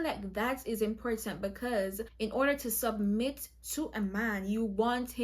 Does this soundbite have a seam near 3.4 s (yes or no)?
no